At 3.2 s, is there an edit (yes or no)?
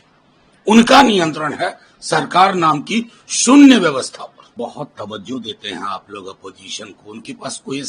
no